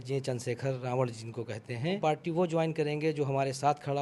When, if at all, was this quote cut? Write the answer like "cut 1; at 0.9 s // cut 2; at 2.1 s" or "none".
cut 1; at 2.0 s